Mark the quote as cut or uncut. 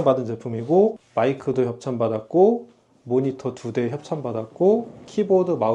cut